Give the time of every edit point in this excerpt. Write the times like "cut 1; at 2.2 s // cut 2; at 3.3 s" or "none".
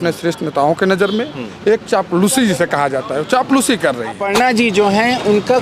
cut 1; at 4.2 s